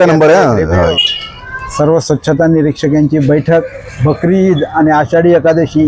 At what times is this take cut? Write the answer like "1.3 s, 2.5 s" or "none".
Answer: 0.9 s